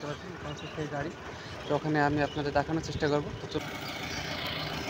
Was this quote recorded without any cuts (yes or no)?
no